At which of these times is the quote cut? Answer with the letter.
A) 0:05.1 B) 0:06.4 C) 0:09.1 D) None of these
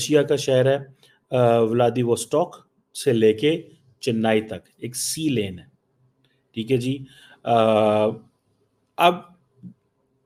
D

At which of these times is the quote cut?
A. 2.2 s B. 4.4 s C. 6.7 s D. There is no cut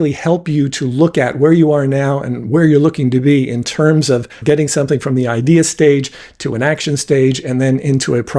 B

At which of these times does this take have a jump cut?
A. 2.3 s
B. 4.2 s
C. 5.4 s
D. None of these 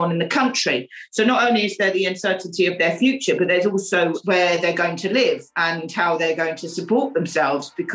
B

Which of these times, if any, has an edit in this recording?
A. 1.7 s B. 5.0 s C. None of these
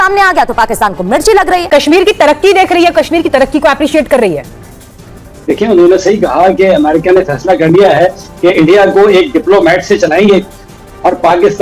A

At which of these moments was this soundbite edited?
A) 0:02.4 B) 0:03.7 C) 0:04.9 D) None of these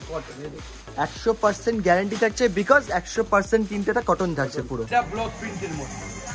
C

